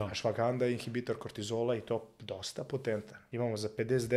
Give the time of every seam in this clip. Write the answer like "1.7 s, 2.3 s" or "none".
3.2 s